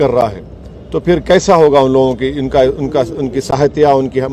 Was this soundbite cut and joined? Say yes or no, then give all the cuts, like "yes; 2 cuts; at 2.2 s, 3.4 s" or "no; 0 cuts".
no; 0 cuts